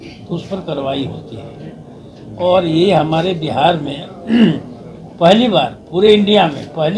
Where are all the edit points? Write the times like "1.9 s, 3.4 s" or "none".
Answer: none